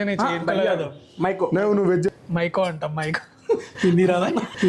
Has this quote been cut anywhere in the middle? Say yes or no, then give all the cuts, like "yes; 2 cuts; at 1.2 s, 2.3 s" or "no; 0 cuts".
yes; 1 cut; at 2.1 s